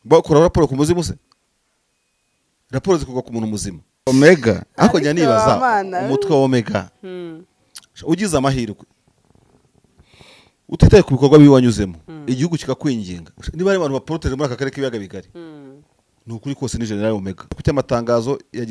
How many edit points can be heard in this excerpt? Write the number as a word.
two